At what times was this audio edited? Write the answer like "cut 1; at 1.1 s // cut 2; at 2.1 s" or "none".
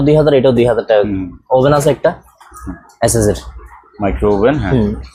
none